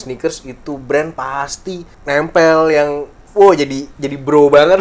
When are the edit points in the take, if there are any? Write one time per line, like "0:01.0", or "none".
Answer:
0:01.9